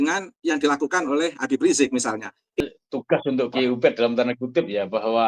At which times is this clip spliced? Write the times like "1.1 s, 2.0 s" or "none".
2.6 s